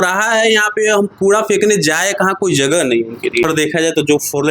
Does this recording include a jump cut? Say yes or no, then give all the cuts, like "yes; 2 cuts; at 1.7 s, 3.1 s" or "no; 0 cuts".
yes; 1 cut; at 3.5 s